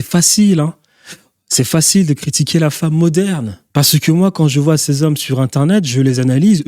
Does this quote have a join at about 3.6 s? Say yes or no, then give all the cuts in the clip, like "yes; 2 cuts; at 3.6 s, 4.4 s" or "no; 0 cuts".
yes; 1 cut; at 3.6 s